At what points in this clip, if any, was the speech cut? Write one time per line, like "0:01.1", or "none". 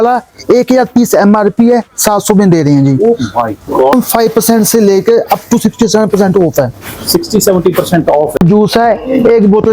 0:03.9
0:08.4